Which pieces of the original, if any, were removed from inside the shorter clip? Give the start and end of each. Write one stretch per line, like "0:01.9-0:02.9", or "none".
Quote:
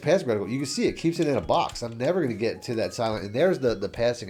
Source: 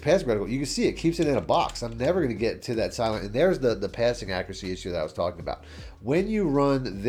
none